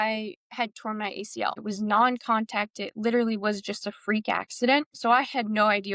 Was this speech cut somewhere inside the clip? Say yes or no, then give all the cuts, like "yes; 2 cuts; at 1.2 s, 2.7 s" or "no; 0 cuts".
yes; 2 cuts; at 1.6 s, 4.9 s